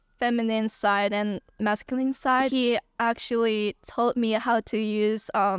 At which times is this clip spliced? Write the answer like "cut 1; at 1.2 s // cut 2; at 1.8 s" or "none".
cut 1; at 2.5 s